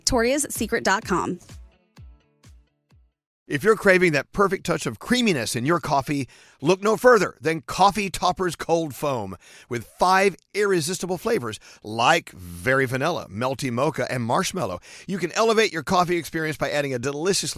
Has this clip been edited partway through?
yes; 1 cut; at 3.4 s

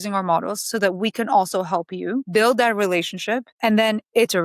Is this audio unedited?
no; 2 cuts; at 2.3 s, 3.5 s

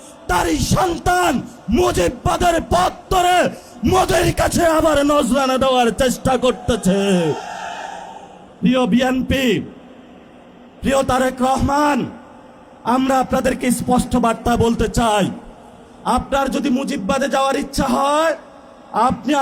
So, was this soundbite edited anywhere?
no; 0 cuts

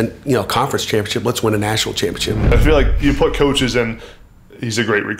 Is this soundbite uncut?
no; 1 cut; at 2.5 s

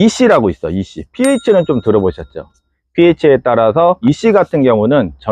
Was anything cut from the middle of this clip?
yes; 1 cut; at 4.0 s

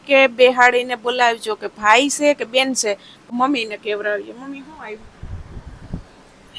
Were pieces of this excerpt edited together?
yes; 1 cut; at 3.2 s

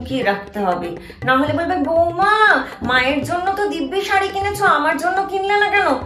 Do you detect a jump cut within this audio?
no; 0 cuts

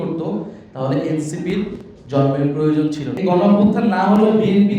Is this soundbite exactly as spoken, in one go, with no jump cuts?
no; 1 cut; at 3.1 s

